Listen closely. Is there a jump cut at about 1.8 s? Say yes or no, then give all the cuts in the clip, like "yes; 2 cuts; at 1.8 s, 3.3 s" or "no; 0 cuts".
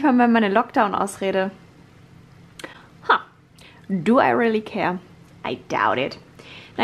no; 0 cuts